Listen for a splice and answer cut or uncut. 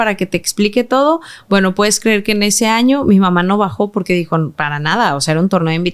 uncut